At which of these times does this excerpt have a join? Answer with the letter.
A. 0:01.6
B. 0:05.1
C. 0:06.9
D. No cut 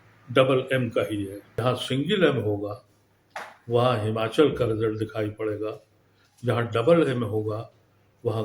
A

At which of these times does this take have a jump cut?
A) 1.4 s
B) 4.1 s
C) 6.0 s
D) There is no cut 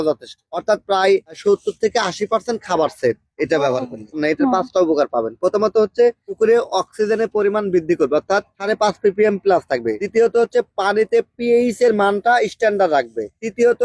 B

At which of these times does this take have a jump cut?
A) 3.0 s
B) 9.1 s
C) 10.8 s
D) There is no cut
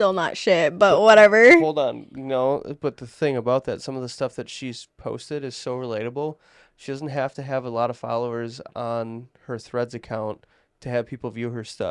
D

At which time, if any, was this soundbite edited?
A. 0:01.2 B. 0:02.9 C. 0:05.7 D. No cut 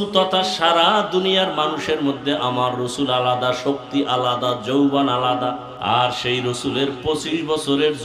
C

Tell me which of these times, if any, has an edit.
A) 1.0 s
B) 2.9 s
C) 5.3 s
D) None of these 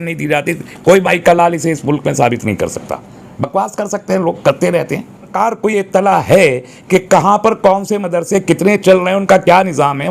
C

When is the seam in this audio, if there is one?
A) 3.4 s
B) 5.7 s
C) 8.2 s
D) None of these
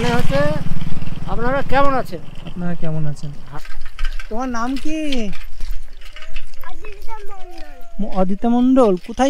A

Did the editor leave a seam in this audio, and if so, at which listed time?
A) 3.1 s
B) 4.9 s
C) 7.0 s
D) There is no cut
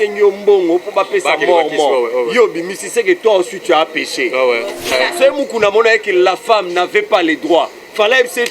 B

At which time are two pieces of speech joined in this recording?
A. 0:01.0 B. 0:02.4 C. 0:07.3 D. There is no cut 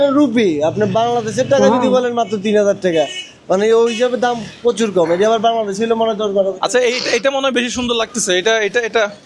D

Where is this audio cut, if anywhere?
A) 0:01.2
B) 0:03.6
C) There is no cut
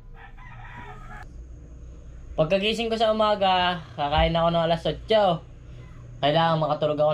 A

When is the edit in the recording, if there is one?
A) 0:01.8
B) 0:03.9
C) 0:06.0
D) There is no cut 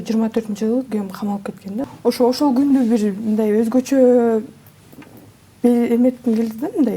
A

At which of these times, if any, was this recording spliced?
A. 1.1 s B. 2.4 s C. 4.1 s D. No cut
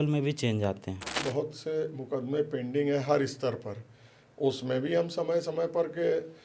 A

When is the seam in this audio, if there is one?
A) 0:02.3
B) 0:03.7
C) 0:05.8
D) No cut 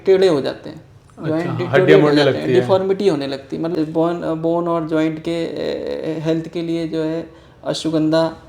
B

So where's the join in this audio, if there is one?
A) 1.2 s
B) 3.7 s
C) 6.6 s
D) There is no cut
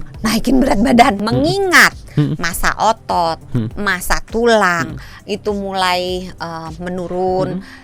A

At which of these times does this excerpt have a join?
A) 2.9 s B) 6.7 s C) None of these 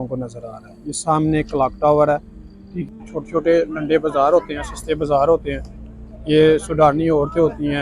A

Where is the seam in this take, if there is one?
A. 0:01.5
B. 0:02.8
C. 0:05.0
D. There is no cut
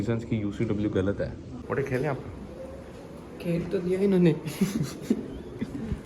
A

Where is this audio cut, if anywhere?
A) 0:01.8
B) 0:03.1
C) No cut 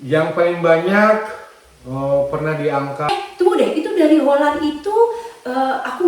B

